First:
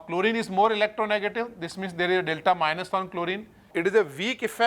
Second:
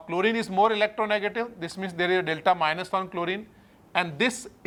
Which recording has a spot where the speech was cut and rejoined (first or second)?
first